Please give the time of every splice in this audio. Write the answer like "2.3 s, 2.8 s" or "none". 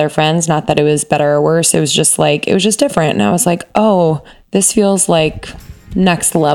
4.3 s